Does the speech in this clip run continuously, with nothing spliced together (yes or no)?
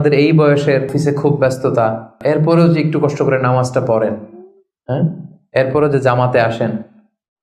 no